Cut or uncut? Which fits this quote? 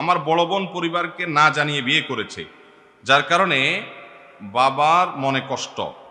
uncut